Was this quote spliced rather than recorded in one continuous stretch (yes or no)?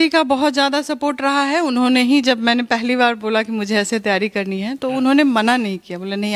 no